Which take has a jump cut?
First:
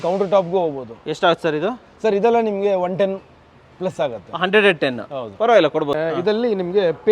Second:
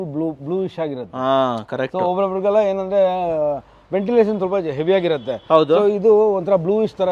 first; 1 cut; at 6.0 s

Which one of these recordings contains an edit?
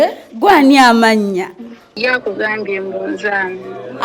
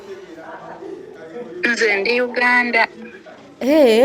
first; 1 cut; at 1.9 s

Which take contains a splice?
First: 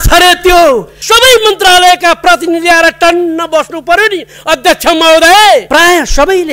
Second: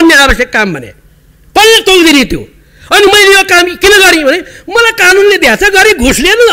first; 2 cuts; at 1.0 s, 5.7 s

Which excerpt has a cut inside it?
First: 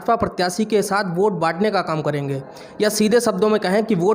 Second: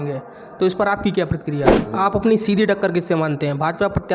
second; 1 cut; at 1.8 s

